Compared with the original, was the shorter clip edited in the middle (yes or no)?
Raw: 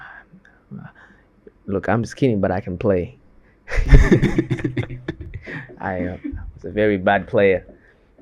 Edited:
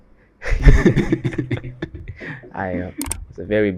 no